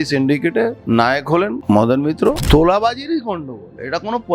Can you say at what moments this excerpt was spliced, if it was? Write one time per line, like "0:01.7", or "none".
0:00.8
0:01.6
0:02.4